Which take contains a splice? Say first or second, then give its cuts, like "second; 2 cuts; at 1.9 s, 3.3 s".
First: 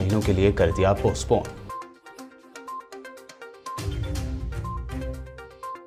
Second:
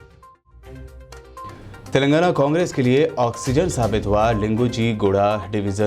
second; 1 cut; at 1.2 s